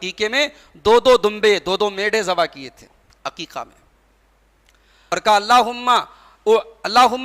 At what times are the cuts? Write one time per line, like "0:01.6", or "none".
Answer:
0:05.0